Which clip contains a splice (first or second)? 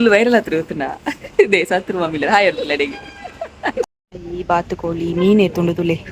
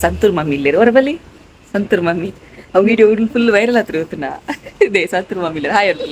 first